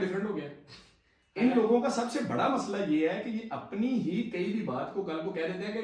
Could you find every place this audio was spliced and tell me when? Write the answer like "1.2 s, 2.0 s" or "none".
none